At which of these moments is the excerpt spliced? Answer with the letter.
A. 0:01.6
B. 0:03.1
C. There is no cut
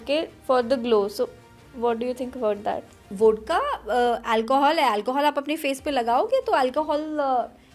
B